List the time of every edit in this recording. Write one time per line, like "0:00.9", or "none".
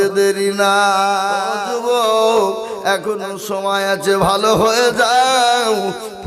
0:01.6